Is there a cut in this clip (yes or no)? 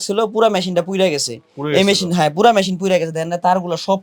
no